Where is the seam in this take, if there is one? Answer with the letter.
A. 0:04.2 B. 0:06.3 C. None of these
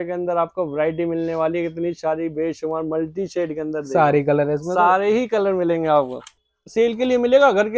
B